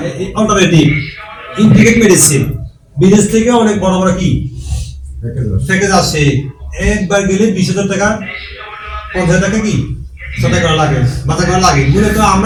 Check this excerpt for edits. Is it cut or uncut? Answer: uncut